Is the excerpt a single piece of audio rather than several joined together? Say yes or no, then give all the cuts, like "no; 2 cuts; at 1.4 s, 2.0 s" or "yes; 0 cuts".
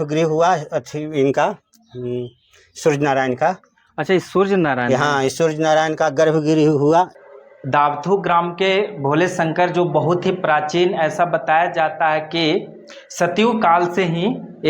no; 1 cut; at 7.2 s